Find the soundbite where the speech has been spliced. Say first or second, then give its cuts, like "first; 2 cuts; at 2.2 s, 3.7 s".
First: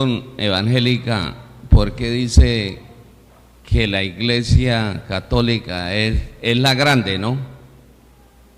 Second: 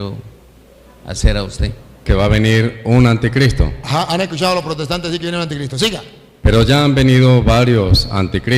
second; 1 cut; at 2.1 s